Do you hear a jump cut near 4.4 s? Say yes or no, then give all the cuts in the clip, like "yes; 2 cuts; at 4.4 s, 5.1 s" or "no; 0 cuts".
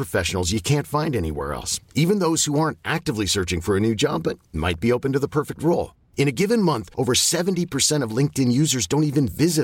no; 0 cuts